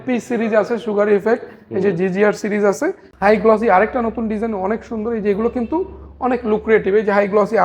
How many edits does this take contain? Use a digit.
1